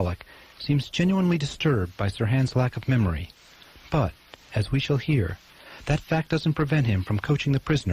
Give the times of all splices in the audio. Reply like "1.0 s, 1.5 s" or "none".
4.9 s